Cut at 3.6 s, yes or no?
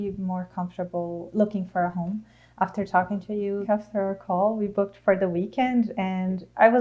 yes